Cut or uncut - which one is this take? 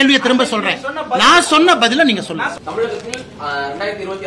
cut